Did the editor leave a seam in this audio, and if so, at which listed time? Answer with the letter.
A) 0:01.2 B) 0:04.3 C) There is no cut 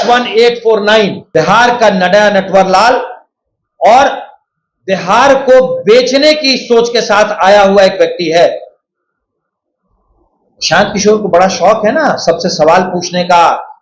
A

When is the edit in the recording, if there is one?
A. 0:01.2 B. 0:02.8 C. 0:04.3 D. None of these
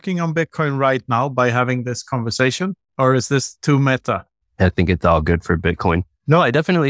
B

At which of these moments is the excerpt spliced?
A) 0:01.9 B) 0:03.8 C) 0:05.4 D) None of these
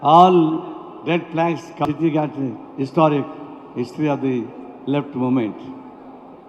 A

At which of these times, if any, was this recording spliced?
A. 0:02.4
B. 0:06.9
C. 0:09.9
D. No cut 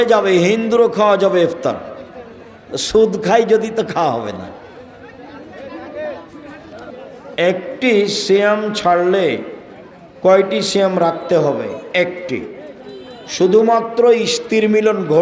B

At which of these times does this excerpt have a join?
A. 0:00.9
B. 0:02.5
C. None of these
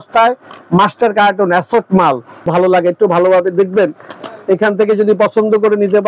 B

